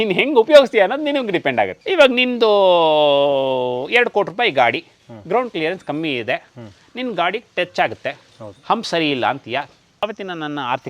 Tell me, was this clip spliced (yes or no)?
yes